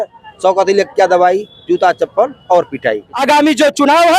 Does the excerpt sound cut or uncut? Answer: cut